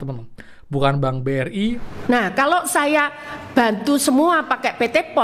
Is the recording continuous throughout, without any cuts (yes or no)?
no